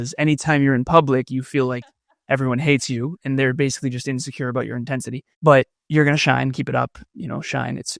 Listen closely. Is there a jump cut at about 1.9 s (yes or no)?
no